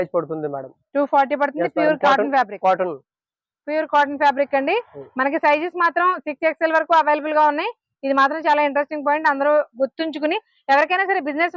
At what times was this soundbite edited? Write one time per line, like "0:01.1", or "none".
none